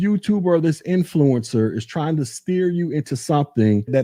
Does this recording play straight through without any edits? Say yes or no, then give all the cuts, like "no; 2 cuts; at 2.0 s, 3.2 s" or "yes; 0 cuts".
yes; 0 cuts